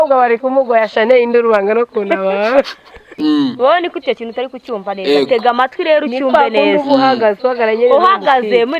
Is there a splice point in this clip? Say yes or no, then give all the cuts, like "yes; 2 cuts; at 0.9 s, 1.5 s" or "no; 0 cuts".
yes; 1 cut; at 3.1 s